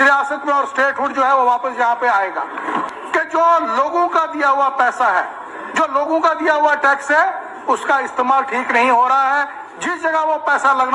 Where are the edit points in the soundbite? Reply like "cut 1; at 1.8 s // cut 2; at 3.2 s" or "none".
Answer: cut 1; at 2.9 s